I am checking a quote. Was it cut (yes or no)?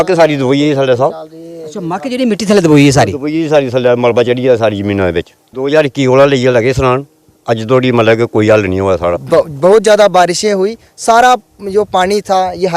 yes